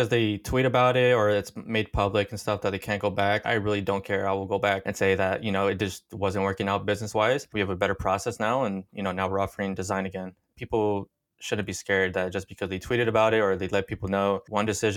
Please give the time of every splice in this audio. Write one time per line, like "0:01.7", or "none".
none